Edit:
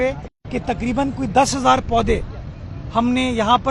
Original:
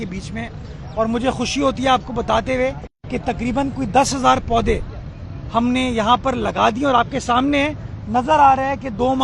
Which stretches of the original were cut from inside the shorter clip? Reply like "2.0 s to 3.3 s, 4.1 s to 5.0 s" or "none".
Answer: none